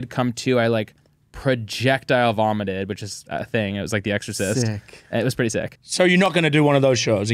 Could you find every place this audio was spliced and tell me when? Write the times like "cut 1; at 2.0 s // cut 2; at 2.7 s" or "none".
cut 1; at 5.8 s

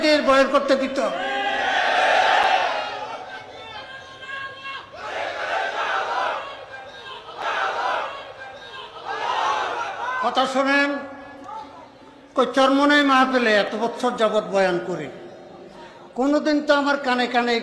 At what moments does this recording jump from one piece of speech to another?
none

